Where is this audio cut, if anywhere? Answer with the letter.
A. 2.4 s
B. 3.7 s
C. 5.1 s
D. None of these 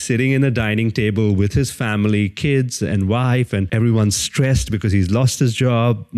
B